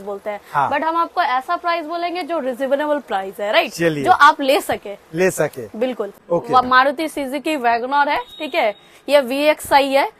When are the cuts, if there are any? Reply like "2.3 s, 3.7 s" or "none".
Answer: 6.1 s